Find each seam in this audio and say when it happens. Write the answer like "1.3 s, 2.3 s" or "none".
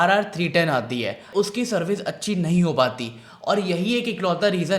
1.3 s